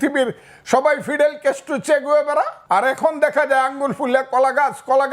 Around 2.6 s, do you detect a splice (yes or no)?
yes